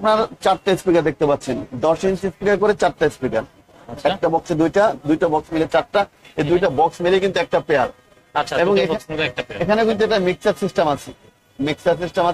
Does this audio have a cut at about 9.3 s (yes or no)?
no